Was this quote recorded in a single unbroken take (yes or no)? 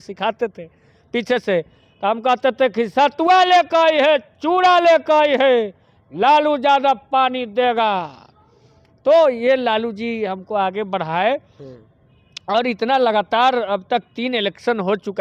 yes